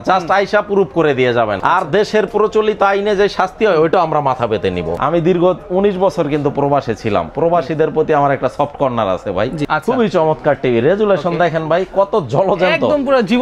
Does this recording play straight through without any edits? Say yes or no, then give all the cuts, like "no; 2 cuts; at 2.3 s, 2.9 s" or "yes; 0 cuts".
no; 3 cuts; at 1.6 s, 5.0 s, 9.6 s